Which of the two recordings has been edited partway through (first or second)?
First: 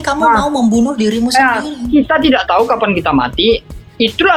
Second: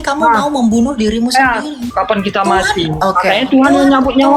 second